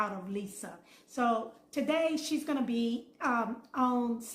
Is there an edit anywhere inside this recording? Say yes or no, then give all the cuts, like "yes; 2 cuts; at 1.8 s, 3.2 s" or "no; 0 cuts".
no; 0 cuts